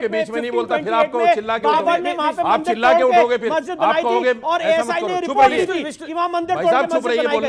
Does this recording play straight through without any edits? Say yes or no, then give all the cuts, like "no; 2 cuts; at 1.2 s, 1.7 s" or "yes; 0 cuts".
yes; 0 cuts